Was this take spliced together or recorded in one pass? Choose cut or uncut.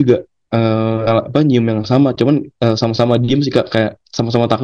cut